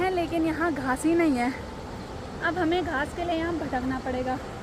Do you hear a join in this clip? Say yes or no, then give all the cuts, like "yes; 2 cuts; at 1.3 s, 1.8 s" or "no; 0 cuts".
no; 0 cuts